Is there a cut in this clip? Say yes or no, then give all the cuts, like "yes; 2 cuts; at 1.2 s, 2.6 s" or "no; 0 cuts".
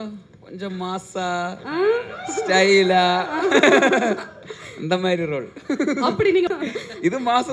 yes; 1 cut; at 6.5 s